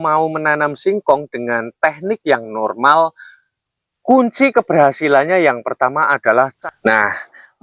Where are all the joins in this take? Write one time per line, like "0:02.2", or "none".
0:06.5